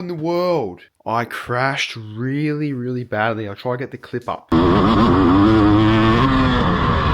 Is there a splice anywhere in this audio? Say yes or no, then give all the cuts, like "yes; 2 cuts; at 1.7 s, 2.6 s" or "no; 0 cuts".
yes; 1 cut; at 0.9 s